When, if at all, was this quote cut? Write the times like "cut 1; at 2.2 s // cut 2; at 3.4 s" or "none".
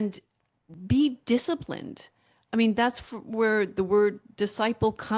none

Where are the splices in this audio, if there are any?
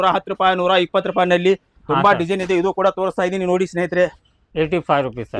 cut 1; at 4.4 s

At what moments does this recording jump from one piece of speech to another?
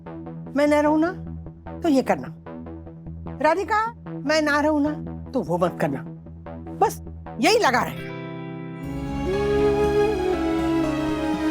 cut 1; at 8.9 s

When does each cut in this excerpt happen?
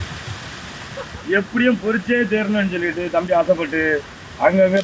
cut 1; at 1.2 s

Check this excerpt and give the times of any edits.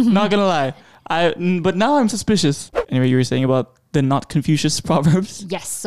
cut 1; at 2.7 s

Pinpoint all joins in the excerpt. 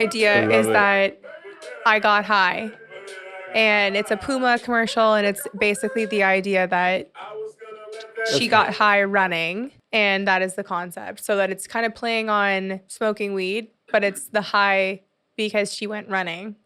cut 1; at 12.8 s

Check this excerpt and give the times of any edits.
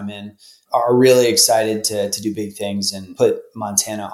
cut 1; at 3.0 s

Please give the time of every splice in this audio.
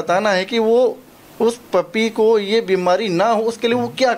none

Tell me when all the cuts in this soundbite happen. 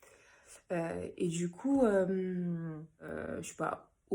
cut 1; at 3.1 s

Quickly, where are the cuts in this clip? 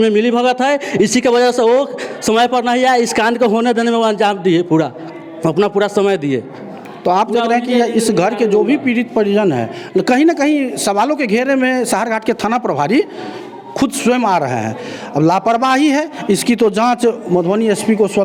none

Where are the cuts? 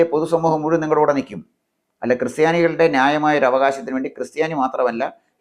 none

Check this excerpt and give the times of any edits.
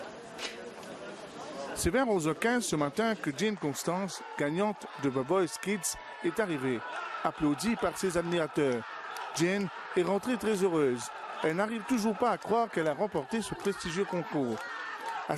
none

